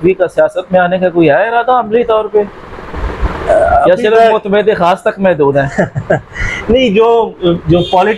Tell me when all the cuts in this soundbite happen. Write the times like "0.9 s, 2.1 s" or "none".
none